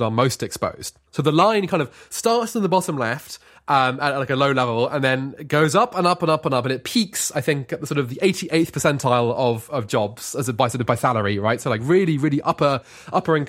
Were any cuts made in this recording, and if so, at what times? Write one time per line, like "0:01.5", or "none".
none